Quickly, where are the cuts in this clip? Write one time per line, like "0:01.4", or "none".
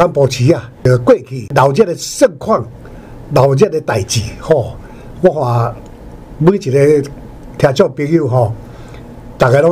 0:00.8
0:01.5

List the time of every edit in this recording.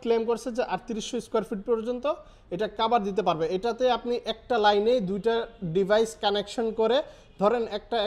none

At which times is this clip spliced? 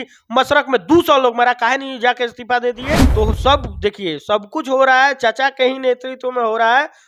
0:03.1

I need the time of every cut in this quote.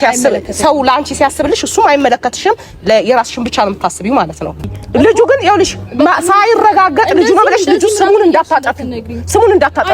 0:04.6

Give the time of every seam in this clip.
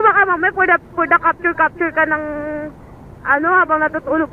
none

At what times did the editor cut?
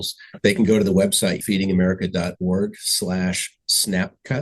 0:01.4

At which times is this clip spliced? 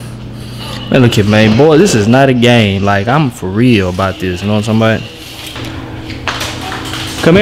0:05.6

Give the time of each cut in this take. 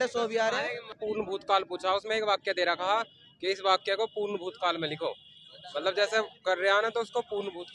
0:01.0

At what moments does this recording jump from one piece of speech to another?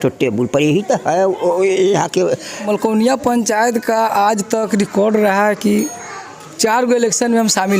0:02.7

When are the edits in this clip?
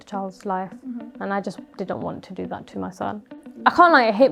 0:03.4

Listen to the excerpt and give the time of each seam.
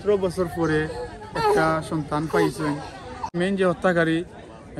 0:03.2

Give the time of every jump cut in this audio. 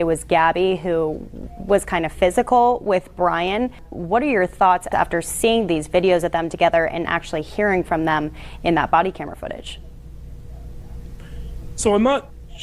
0:03.9
0:04.9

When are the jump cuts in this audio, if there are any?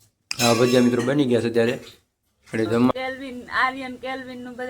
0:02.9

